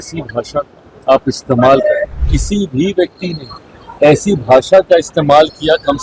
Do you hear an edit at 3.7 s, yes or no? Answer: no